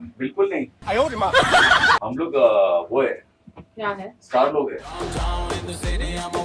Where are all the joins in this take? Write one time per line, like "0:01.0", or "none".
0:04.9